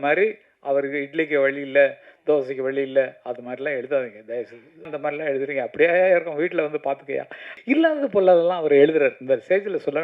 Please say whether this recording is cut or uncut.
cut